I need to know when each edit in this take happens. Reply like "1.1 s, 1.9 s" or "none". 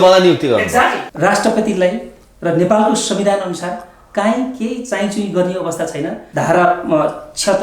1.1 s, 6.2 s